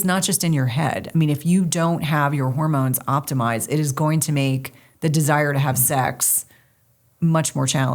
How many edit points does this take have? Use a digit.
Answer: 0